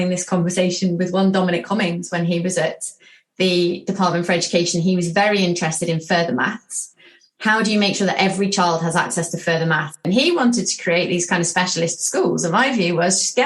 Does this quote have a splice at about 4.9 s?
no; 1 cut; at 10.0 s

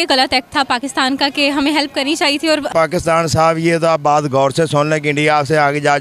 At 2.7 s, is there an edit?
yes; 1 cut; at 2.7 s

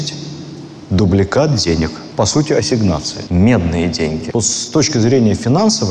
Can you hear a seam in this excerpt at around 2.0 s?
no; 1 cut; at 4.2 s

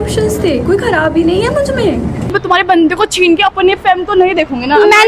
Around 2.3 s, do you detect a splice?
yes; 1 cut; at 2.3 s

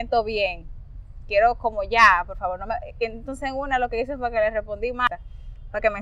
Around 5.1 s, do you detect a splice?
yes; 1 cut; at 5.1 s

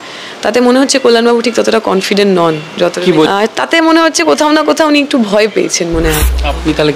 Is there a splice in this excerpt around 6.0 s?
yes; 2 cuts; at 3.3 s, 6.0 s

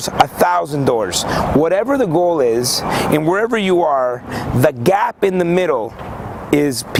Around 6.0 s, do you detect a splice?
no; 0 cuts

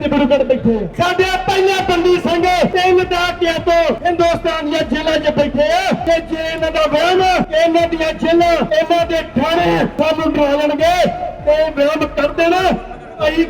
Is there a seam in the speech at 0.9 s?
yes; 7 cuts; at 0.9 s, 2.7 s, 4.0 s, 6.0 s, 7.5 s, 8.7 s, 9.9 s

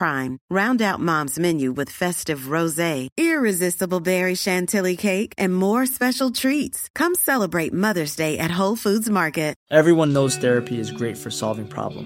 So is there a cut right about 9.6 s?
yes; 1 cut; at 9.6 s

